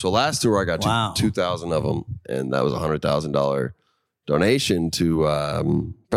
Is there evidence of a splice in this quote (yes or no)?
no